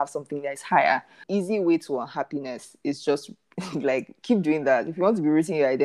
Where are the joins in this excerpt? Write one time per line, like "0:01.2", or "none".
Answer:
0:01.2